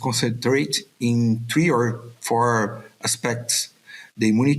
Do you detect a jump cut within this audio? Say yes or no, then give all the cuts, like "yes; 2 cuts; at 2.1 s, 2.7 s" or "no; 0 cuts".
no; 0 cuts